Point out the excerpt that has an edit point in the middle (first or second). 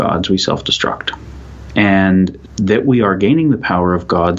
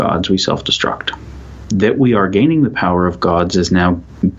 second